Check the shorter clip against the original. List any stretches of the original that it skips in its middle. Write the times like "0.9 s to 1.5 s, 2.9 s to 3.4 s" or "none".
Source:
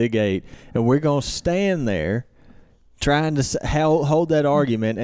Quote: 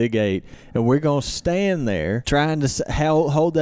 2.2 s to 3.0 s